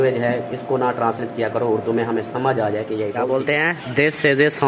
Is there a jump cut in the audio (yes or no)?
yes